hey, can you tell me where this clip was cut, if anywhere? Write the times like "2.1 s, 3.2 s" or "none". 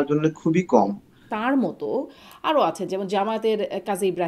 1.2 s